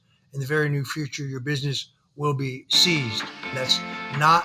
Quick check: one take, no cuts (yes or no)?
no